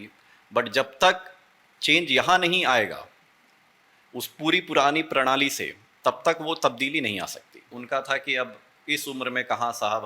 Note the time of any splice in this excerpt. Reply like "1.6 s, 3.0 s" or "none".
7.8 s